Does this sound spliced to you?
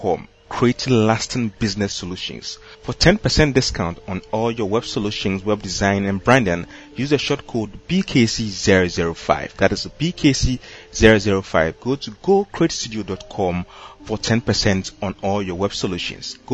no; 0 cuts

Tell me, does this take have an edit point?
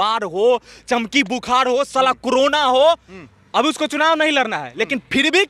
no; 0 cuts

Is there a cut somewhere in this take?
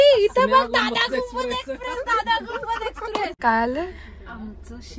yes; 1 cut; at 3.3 s

